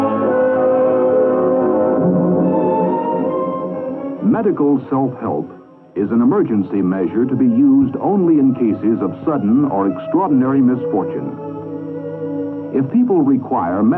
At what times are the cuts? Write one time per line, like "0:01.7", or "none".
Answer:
none